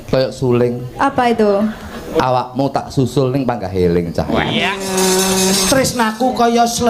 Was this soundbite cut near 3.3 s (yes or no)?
no